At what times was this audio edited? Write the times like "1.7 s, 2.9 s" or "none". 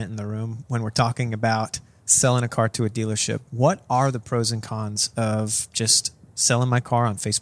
3.4 s

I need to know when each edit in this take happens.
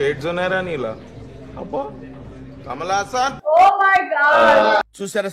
3.4 s

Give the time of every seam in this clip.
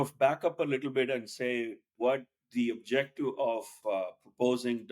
1.9 s, 3.8 s

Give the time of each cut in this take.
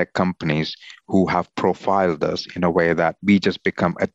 3.2 s

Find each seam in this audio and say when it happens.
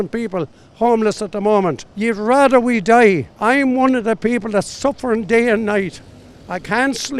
1.9 s, 3.3 s

